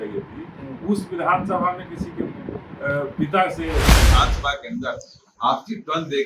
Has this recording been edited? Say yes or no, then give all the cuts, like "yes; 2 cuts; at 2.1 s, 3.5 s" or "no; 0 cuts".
yes; 1 cut; at 3.9 s